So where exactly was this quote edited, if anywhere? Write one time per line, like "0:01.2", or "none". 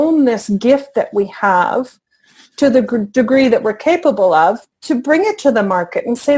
none